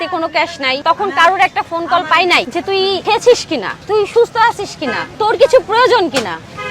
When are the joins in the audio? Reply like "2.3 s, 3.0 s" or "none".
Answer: 0.8 s, 2.7 s